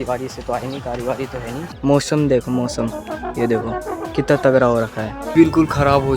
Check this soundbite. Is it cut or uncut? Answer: cut